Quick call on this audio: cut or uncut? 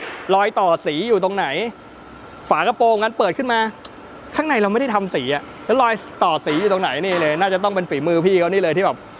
uncut